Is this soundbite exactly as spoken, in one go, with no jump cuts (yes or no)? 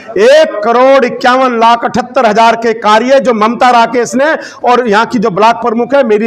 yes